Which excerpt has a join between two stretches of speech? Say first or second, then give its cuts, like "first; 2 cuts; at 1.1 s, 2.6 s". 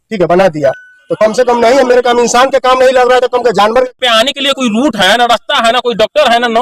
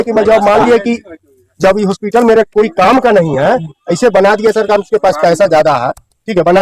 first; 1 cut; at 3.9 s